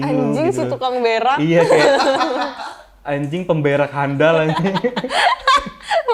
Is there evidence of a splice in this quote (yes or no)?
no